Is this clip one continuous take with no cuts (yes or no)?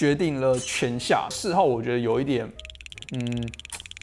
yes